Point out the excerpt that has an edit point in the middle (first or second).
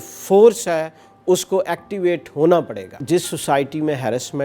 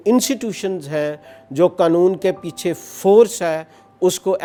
first